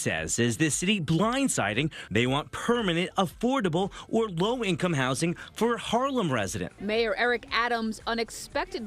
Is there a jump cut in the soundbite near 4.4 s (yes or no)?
no